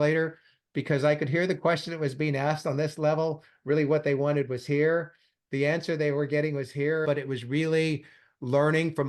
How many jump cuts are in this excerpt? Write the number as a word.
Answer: one